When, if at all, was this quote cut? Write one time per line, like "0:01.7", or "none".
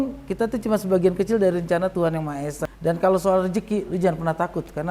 0:02.6